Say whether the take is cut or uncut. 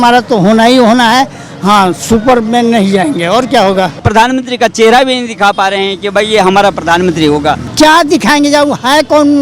cut